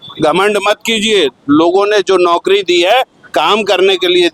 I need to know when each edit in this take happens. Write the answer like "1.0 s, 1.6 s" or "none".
none